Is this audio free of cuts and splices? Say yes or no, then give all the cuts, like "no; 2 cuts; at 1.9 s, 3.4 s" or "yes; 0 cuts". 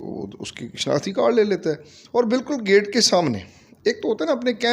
yes; 0 cuts